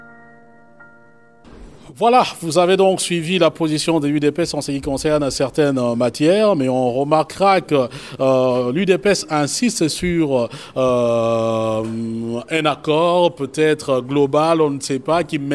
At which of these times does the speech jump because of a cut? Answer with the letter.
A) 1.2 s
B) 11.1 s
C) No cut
A